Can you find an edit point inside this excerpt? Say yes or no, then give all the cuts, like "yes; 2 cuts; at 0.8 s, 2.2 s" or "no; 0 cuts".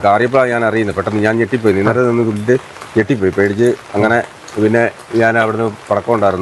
no; 0 cuts